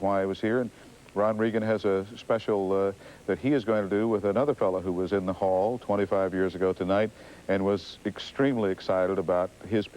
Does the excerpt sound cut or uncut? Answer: cut